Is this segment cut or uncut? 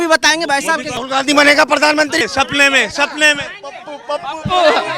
cut